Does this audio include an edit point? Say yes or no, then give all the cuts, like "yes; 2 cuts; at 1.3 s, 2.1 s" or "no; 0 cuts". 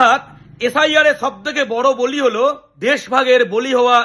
yes; 1 cut; at 2.7 s